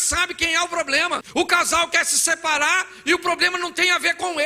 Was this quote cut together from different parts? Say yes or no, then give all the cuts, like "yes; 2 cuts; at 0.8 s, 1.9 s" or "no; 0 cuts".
yes; 1 cut; at 1.3 s